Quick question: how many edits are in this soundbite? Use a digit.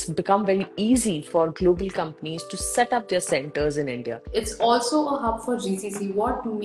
1